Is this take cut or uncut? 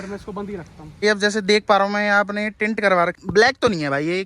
cut